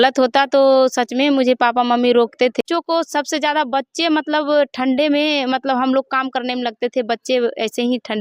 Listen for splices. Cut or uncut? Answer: cut